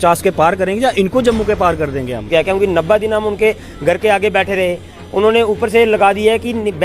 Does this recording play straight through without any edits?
no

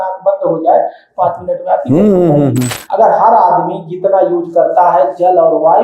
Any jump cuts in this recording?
yes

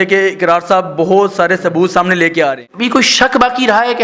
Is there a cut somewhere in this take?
yes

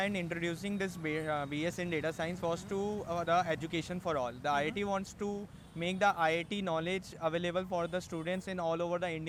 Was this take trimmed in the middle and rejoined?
no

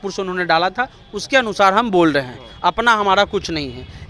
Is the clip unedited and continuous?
yes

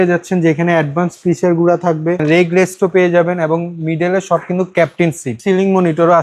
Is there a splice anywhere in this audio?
yes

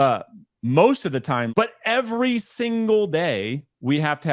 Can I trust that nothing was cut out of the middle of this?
no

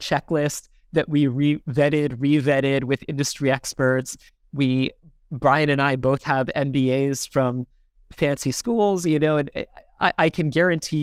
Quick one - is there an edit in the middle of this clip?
no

